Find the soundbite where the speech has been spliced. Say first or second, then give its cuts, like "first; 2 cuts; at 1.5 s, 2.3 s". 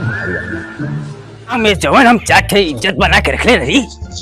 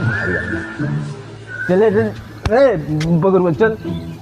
first; 1 cut; at 1.6 s